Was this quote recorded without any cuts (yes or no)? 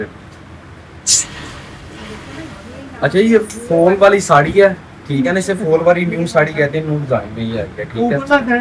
yes